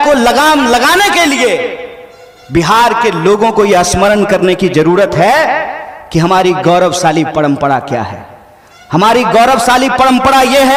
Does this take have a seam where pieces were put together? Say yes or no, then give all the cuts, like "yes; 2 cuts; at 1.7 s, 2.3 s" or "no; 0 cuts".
no; 0 cuts